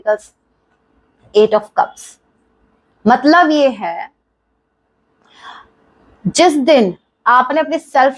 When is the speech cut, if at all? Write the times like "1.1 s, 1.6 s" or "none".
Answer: none